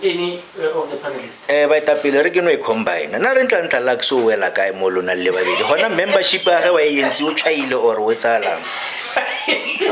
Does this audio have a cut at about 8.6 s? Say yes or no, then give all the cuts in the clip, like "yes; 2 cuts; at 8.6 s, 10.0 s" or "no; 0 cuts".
no; 0 cuts